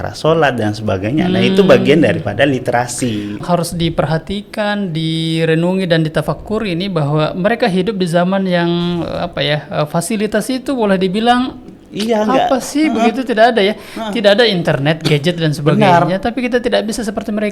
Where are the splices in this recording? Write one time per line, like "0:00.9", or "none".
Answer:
0:03.4